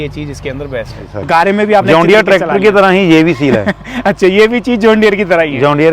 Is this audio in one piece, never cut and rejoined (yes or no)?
no